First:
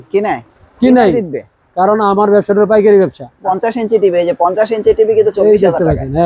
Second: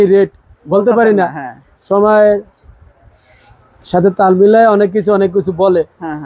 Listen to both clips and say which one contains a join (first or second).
first